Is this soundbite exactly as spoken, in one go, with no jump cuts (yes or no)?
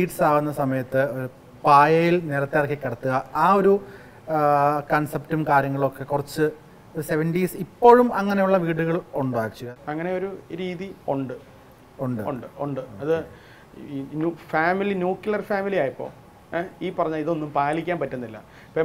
no